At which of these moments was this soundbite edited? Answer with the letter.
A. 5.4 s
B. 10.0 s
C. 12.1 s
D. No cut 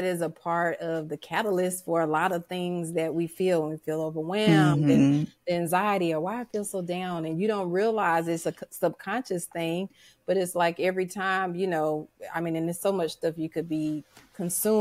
D